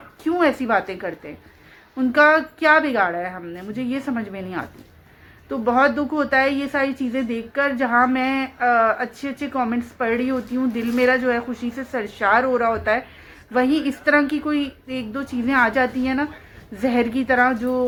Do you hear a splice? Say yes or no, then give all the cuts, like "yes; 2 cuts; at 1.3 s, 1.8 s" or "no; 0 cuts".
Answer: no; 0 cuts